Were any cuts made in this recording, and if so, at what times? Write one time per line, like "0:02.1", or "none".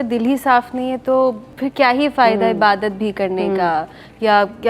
none